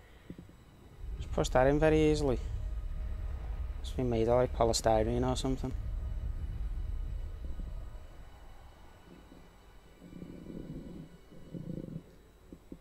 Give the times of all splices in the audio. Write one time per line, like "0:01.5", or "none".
0:04.5